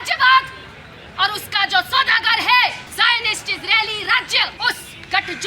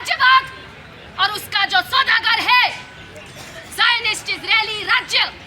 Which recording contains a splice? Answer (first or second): first